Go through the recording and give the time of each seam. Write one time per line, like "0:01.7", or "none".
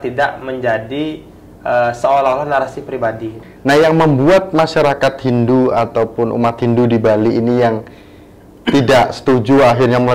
0:03.4